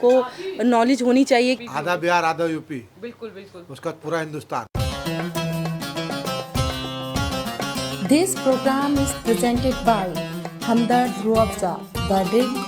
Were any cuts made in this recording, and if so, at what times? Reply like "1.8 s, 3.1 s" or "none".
1.6 s, 4.7 s